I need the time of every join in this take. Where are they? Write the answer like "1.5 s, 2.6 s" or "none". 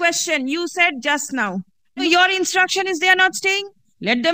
2.0 s